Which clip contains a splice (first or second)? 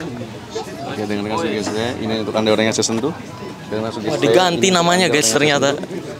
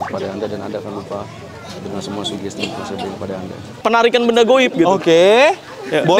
second